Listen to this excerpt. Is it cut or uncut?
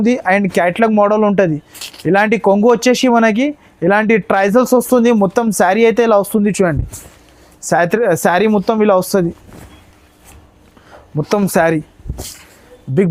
uncut